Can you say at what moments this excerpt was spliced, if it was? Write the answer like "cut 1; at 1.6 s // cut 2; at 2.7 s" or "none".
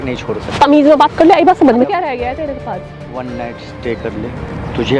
cut 1; at 1.9 s